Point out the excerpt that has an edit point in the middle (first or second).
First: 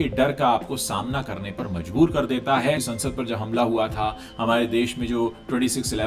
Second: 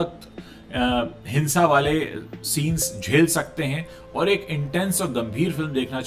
first